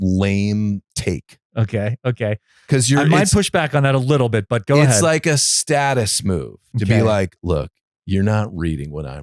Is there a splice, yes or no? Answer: yes